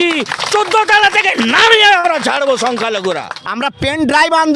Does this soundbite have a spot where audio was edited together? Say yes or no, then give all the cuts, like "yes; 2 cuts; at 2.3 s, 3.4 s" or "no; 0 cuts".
yes; 1 cut; at 3.3 s